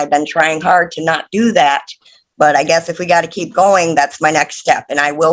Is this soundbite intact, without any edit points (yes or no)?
yes